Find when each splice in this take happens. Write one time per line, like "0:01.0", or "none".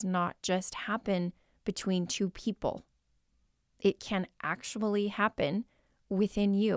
none